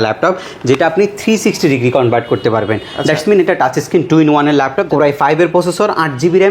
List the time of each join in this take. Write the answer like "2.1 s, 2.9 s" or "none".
4.8 s

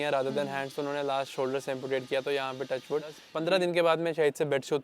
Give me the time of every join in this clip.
3.3 s

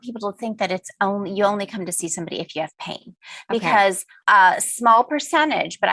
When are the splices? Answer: 4.2 s

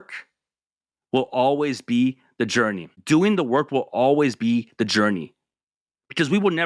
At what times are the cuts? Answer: 2.9 s

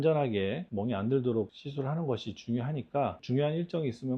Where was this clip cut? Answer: none

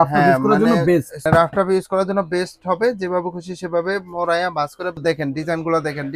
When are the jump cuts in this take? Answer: 1.2 s, 5.0 s

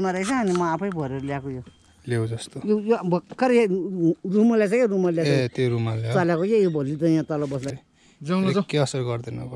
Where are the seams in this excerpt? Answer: 7.7 s

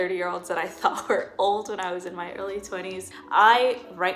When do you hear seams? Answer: 3.1 s

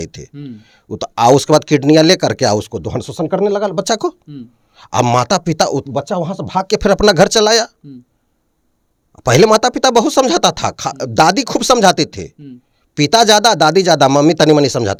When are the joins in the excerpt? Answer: none

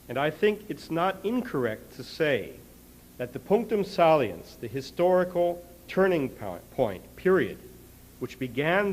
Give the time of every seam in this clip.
2.2 s

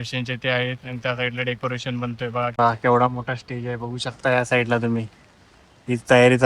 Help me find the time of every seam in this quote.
2.5 s

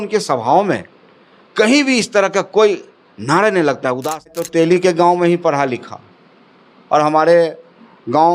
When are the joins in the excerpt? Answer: 4.4 s

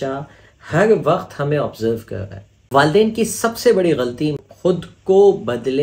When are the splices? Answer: 2.5 s, 4.4 s

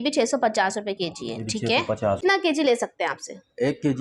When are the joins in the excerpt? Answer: 2.2 s

